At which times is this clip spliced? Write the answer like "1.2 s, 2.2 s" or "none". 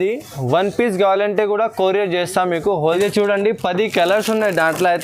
3.0 s